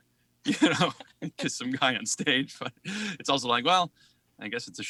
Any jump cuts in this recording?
no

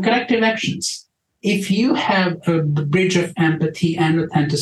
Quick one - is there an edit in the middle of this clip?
yes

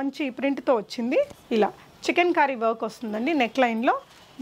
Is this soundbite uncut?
no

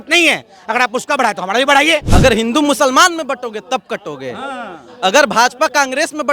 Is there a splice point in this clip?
yes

